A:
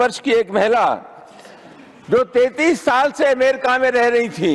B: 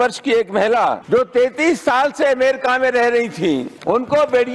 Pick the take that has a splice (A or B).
B